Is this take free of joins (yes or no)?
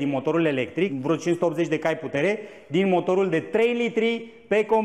no